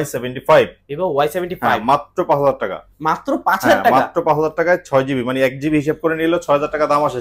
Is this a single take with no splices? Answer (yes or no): yes